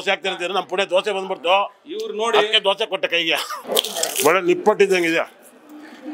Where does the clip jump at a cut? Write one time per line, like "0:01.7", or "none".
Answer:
0:03.5